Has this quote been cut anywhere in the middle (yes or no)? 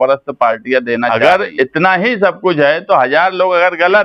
yes